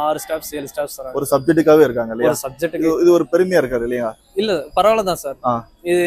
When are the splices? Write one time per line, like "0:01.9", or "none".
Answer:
none